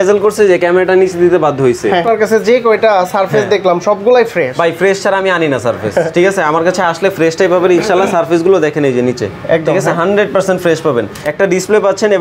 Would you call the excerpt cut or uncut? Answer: cut